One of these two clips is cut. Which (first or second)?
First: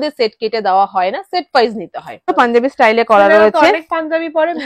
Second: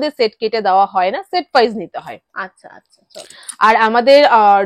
first